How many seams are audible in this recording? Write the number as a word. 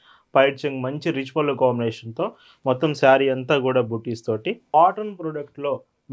one